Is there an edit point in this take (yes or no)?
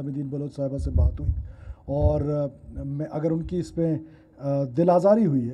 no